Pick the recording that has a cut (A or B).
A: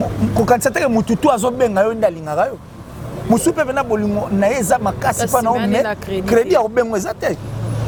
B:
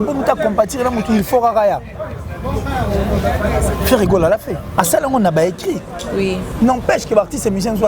B